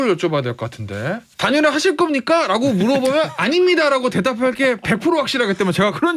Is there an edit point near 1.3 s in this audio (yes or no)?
yes